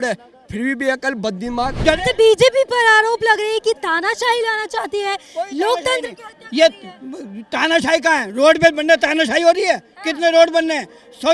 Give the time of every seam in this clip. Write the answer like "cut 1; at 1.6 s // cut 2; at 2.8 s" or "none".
cut 1; at 1.8 s

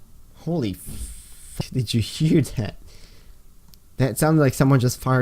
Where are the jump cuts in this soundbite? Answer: cut 1; at 1.5 s

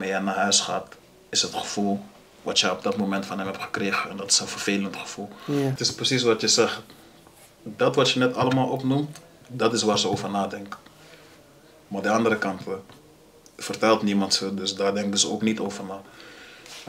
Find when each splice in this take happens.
cut 1; at 5.8 s

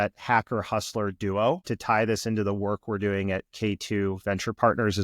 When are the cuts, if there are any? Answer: cut 1; at 1.6 s

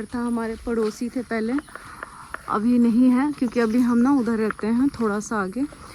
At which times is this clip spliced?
none

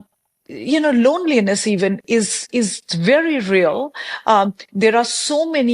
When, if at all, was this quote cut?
none

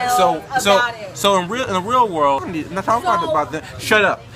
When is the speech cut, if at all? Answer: cut 1; at 2.5 s

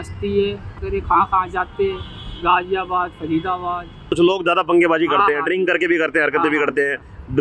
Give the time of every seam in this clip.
cut 1; at 0.8 s // cut 2; at 4.1 s

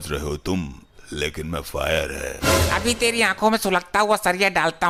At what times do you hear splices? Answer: none

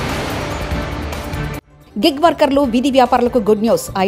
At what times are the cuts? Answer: none

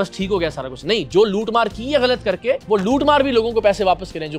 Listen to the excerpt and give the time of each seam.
cut 1; at 2.6 s

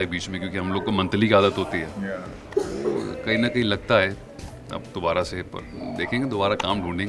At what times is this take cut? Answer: none

